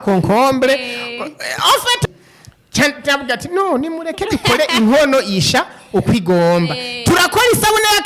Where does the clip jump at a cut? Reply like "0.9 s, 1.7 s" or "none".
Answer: 2.1 s